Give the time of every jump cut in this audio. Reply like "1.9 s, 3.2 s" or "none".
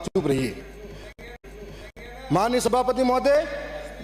none